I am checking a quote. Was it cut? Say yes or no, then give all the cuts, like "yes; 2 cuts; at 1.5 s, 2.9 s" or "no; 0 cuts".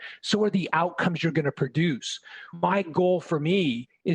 yes; 1 cut; at 2.7 s